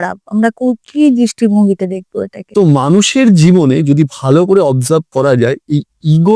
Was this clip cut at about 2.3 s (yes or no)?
yes